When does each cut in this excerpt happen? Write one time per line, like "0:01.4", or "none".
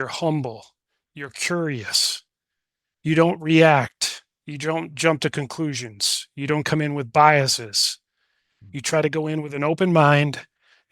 0:04.9